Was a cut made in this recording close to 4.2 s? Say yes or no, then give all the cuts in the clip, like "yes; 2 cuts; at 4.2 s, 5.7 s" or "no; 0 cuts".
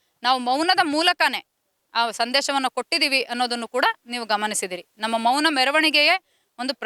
no; 0 cuts